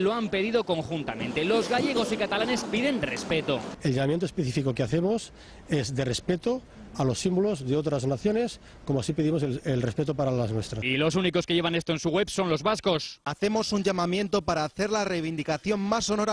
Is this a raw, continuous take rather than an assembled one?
yes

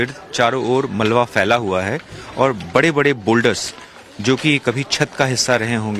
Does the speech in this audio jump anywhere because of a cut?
yes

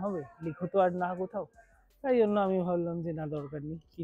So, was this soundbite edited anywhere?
no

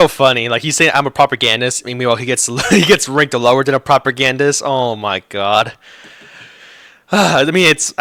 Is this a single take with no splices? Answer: yes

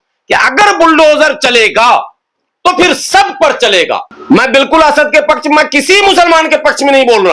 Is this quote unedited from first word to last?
no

